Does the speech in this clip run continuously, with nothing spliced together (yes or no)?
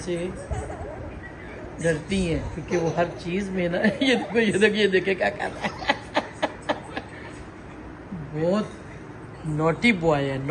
yes